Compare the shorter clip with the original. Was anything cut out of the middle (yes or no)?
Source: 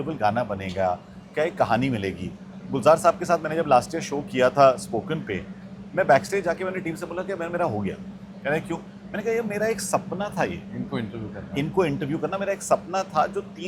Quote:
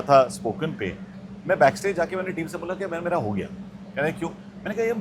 no